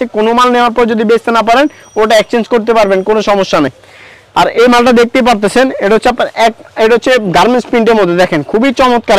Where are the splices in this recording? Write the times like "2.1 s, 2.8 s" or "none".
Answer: none